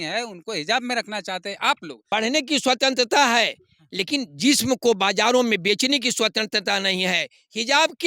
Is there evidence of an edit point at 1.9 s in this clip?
yes; 1 cut; at 1.9 s

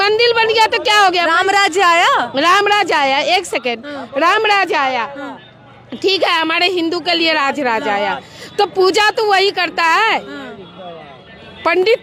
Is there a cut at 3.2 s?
no; 0 cuts

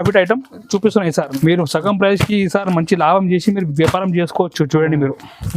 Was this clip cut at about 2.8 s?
no; 1 cut; at 1.3 s

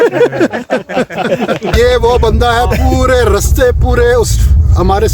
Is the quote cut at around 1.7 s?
yes; 1 cut; at 1.7 s

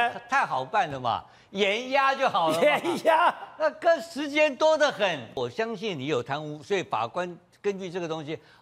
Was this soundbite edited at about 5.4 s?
yes; 1 cut; at 5.4 s

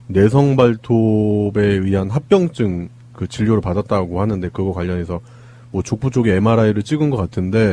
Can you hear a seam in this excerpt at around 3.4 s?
no; 1 cut; at 1.8 s

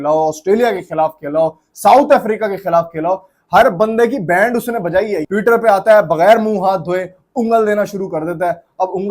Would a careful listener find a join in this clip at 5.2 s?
yes; 1 cut; at 5.2 s

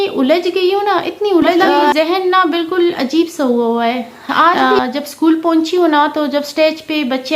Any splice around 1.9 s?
yes; 2 cuts; at 1.9 s, 4.6 s

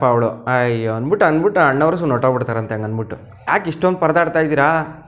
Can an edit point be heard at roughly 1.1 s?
no; 1 cut; at 3.4 s

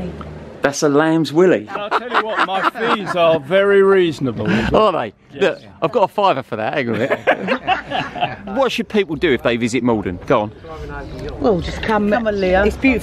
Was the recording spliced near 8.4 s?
yes; 2 cuts; at 1.8 s, 8.4 s

